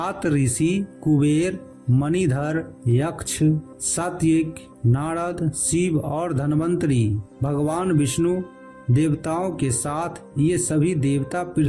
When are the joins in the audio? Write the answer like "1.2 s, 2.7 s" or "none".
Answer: 0.9 s